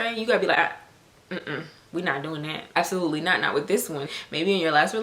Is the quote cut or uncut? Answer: cut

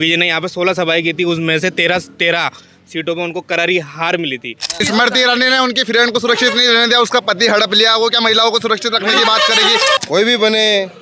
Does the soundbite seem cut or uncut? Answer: cut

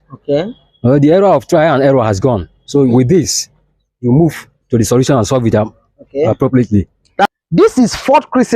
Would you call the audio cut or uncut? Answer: cut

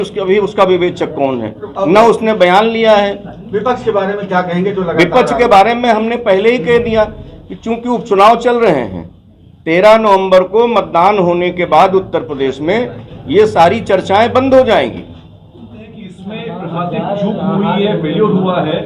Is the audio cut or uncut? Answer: uncut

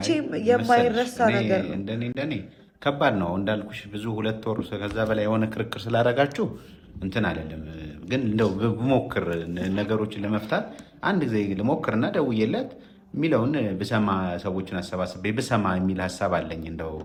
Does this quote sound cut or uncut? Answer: uncut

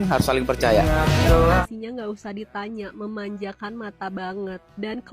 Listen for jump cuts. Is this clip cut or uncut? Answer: cut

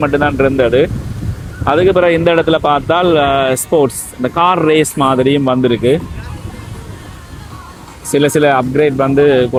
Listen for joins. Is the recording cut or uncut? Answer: uncut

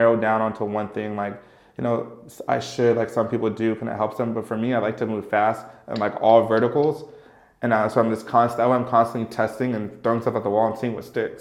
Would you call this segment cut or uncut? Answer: uncut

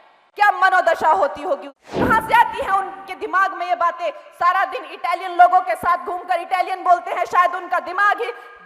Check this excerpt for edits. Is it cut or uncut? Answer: cut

